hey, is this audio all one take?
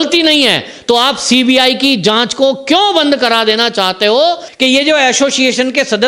no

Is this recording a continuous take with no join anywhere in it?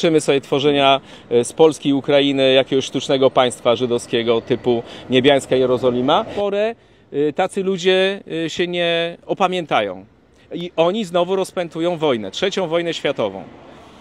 no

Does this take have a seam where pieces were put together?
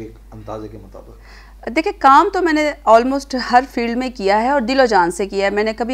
no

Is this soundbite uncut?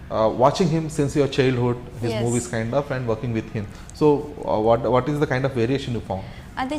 yes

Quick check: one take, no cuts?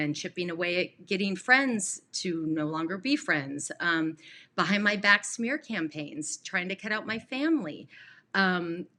yes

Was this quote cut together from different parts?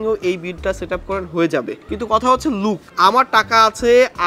yes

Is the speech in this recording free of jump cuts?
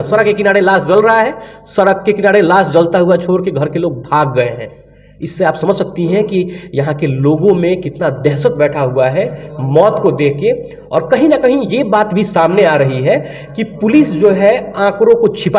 yes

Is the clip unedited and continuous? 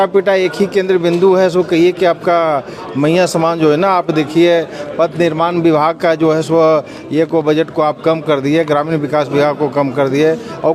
yes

